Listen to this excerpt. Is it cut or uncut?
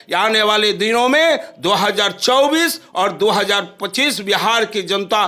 uncut